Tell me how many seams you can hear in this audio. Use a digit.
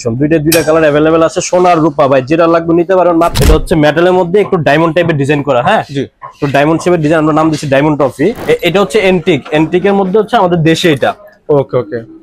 2